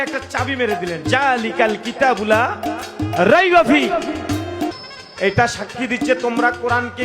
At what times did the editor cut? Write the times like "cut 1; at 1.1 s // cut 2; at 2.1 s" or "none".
cut 1; at 4.7 s